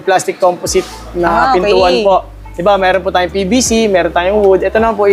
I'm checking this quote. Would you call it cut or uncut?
uncut